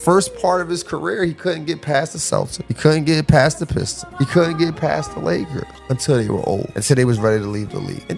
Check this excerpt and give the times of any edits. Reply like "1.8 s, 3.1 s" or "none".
6.8 s